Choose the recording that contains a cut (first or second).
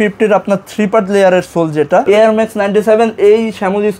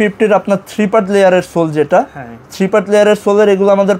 first